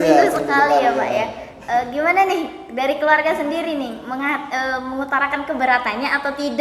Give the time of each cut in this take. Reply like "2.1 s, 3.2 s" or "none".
none